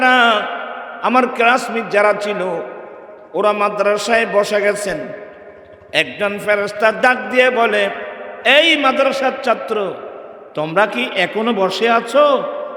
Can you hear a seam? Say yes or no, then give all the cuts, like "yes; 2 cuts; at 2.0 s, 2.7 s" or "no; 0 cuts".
no; 0 cuts